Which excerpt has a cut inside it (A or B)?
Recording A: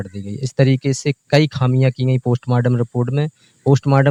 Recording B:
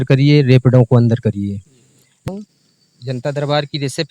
B